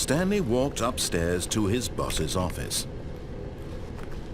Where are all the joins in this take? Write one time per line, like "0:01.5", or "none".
none